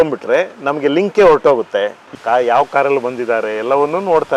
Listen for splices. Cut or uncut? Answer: cut